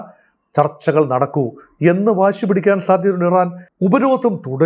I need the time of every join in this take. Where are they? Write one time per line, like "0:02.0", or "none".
0:03.6

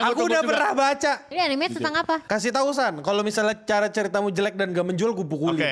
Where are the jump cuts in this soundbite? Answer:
0:01.2
0:02.2

